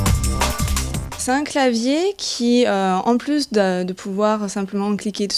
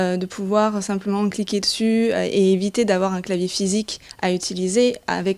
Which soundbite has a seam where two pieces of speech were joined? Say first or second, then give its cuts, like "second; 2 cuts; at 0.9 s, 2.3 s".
first; 1 cut; at 2.1 s